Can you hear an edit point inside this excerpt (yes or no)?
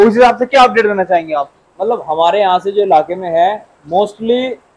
no